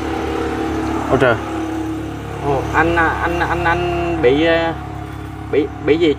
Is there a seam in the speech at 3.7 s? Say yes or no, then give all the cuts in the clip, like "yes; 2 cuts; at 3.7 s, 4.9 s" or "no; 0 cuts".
no; 0 cuts